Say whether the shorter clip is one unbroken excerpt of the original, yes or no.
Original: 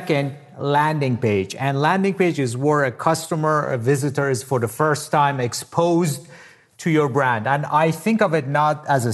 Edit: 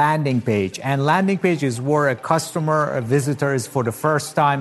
yes